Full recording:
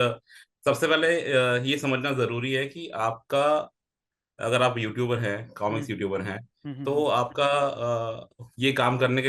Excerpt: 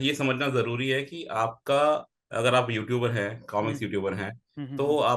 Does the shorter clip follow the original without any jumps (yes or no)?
no